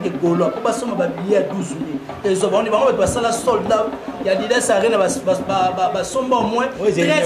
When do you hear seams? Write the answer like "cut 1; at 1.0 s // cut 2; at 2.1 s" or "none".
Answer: none

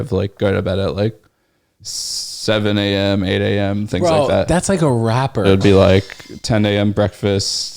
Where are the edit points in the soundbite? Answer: cut 1; at 5.4 s

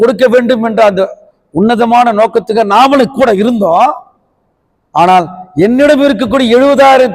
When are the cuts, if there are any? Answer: none

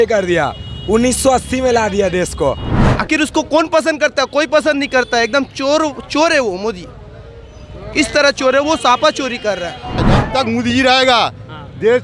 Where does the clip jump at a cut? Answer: cut 1; at 2.7 s // cut 2; at 10.0 s

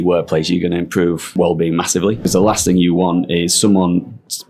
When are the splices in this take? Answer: cut 1; at 1.3 s // cut 2; at 2.3 s

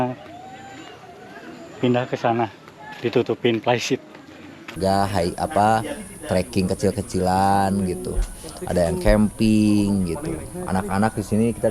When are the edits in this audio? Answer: cut 1; at 4.7 s

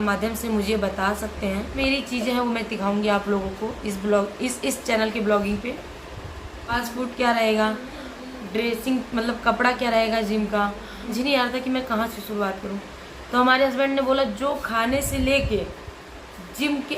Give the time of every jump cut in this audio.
cut 1; at 1.8 s // cut 2; at 6.7 s // cut 3; at 11.1 s

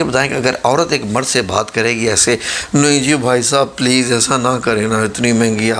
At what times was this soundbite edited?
none

